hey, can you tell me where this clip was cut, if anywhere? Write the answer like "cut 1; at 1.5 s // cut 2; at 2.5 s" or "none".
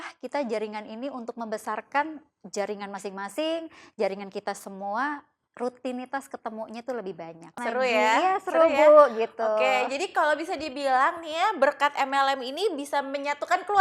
cut 1; at 7.5 s